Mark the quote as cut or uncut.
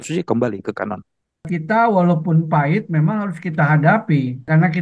cut